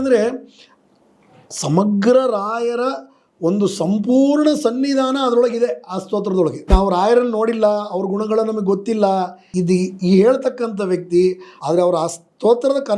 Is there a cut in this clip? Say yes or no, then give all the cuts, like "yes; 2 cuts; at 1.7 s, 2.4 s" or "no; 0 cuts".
yes; 3 cuts; at 6.7 s, 9.5 s, 11.5 s